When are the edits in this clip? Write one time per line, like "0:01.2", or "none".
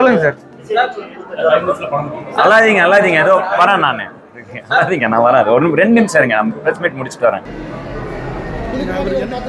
0:07.5